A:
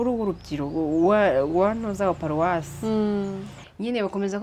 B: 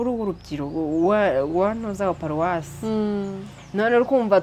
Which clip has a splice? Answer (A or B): A